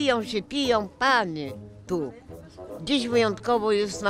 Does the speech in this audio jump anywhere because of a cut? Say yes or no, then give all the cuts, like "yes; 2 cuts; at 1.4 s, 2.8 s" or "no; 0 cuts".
no; 0 cuts